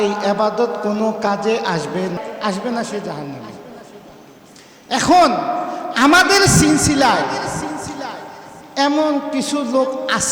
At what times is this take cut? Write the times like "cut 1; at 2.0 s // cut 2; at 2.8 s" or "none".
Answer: cut 1; at 2.2 s